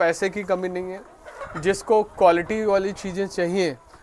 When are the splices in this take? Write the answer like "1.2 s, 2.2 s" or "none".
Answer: none